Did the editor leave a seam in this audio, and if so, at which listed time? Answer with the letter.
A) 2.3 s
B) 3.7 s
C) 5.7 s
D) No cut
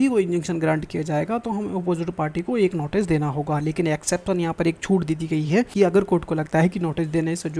C